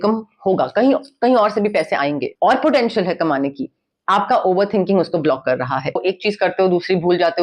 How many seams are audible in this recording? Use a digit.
2